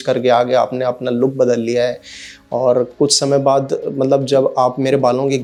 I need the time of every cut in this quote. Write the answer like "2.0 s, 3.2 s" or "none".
none